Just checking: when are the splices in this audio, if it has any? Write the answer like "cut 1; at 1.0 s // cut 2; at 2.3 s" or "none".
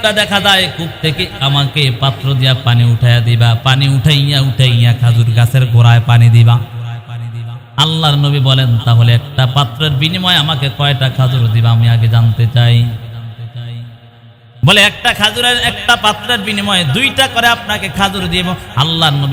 none